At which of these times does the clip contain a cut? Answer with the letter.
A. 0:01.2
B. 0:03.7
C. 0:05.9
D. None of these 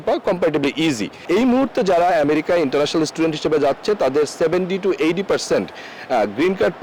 A